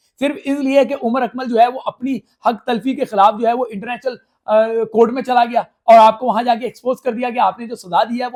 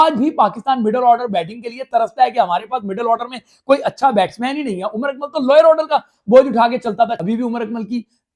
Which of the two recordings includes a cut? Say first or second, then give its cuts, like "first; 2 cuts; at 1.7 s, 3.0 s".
second; 1 cut; at 7.2 s